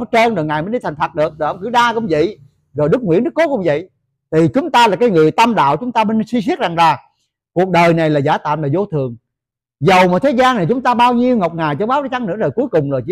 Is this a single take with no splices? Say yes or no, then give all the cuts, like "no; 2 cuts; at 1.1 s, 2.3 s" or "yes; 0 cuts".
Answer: yes; 0 cuts